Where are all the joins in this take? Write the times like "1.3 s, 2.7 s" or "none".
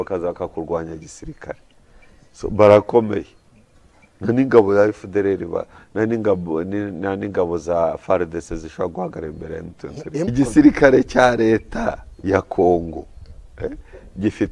10.3 s